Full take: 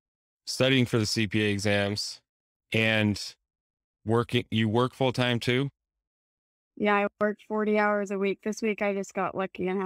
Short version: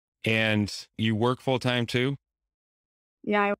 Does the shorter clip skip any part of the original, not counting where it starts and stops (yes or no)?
yes